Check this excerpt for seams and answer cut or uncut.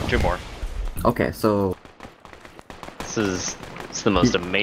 cut